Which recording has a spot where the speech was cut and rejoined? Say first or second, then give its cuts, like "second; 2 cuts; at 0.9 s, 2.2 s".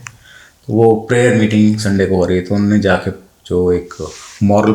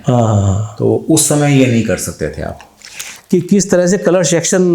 second; 1 cut; at 3.1 s